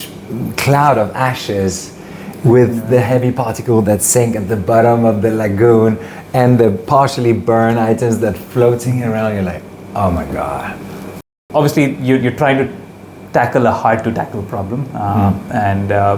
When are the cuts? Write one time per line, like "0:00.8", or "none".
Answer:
0:11.5